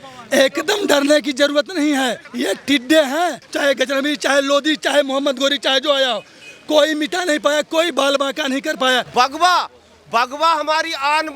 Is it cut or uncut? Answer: cut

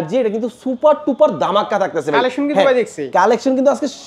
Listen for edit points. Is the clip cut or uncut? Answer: uncut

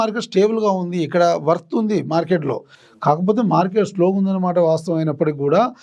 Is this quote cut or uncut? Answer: uncut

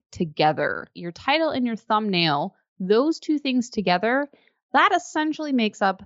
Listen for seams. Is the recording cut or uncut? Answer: cut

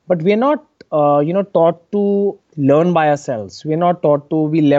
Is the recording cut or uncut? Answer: cut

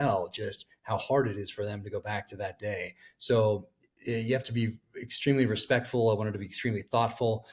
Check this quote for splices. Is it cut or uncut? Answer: uncut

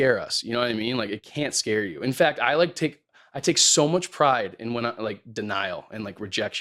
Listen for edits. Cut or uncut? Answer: uncut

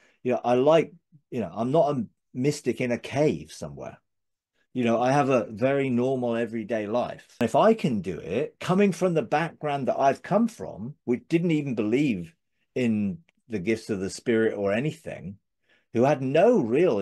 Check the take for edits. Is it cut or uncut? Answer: cut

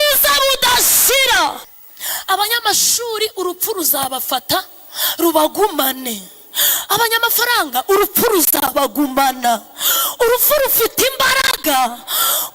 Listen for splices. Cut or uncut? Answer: cut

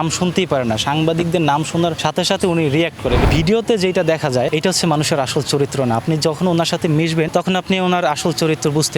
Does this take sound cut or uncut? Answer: cut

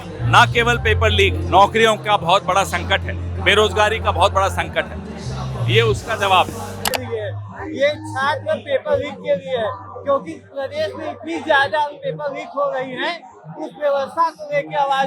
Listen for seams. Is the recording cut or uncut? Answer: cut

